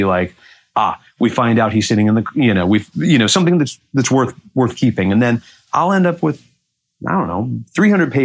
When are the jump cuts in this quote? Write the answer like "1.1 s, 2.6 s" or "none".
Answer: none